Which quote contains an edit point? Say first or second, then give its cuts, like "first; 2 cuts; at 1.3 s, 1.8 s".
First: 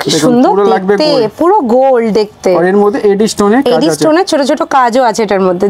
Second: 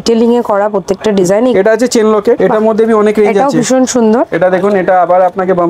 second; 2 cuts; at 1.5 s, 4.3 s